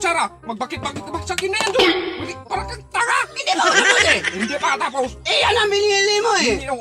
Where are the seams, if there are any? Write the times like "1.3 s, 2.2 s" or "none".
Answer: none

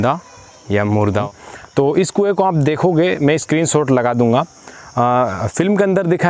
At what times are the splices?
1.2 s

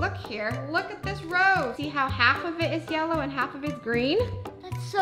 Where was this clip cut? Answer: none

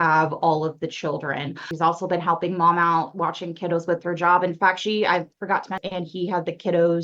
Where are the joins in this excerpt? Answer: 1.7 s, 5.8 s

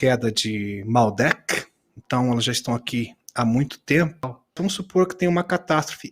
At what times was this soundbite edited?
4.5 s

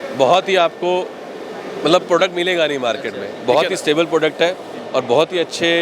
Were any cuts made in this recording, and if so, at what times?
3.3 s

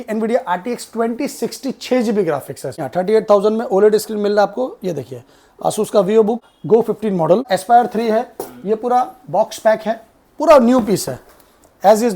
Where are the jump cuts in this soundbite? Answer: 2.9 s, 6.5 s, 7.5 s

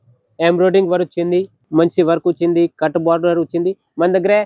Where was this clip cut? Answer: 1.6 s

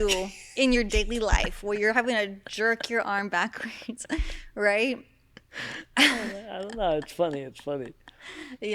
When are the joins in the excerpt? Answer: none

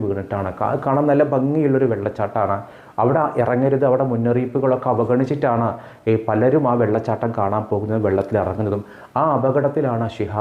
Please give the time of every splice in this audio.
none

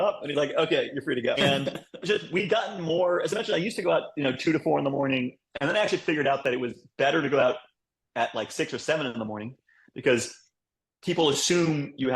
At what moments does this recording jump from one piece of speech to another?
1.4 s

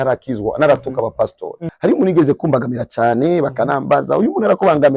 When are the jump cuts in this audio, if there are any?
1.6 s

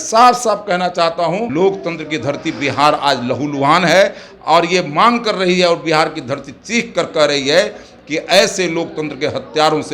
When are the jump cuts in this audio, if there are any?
1.5 s

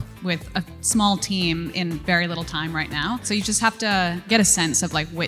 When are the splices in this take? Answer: 3.2 s, 4.3 s

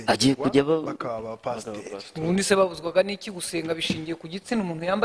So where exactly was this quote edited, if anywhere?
none

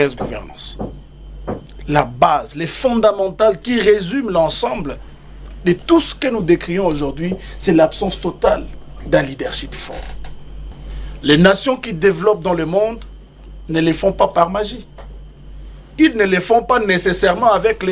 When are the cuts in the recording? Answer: 10.7 s

